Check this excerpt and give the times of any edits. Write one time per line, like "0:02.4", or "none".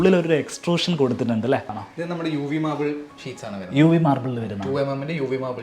0:01.9